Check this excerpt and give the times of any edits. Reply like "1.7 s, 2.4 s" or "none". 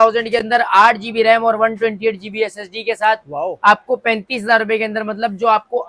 none